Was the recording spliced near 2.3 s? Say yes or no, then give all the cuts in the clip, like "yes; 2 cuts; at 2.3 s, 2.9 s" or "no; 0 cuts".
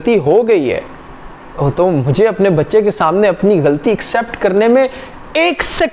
no; 0 cuts